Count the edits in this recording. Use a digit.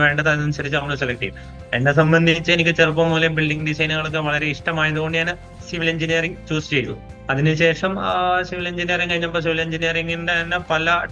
1